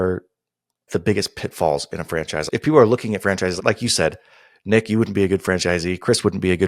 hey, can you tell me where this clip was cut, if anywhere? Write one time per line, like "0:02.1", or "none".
0:00.8
0:02.5